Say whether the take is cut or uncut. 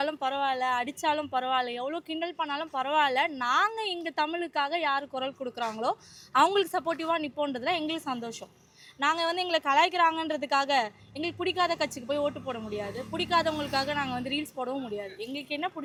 uncut